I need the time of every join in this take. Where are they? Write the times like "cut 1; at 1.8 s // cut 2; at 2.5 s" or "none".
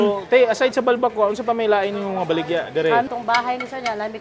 cut 1; at 3.1 s